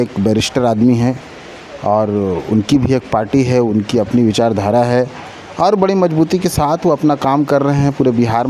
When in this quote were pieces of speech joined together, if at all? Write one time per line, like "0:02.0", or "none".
none